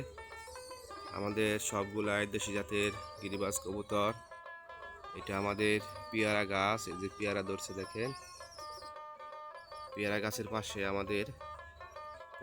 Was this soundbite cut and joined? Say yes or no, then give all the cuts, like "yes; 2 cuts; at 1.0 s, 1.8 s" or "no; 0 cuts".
no; 0 cuts